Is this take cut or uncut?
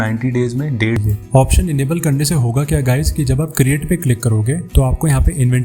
cut